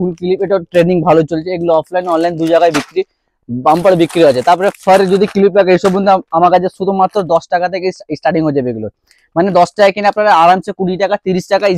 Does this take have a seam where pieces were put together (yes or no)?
no